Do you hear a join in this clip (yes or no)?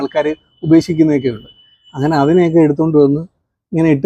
no